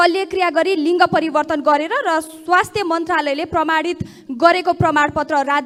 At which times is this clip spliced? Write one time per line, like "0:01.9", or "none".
none